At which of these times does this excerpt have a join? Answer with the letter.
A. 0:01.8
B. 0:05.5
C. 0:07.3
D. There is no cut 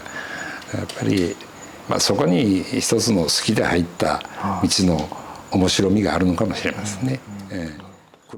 D